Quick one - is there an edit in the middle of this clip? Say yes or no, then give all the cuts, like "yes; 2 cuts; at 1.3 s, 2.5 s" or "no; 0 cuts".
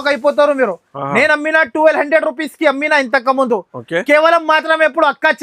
no; 0 cuts